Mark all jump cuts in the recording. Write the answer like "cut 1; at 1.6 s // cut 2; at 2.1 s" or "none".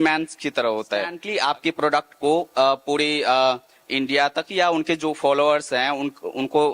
cut 1; at 1.2 s